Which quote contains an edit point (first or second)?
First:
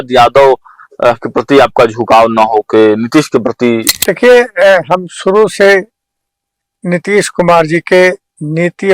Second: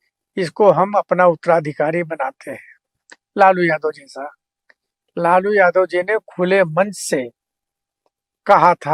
first